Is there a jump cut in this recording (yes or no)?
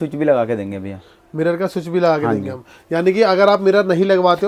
no